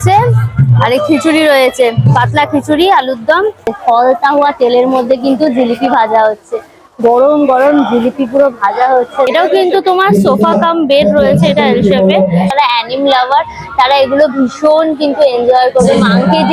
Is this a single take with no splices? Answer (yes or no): no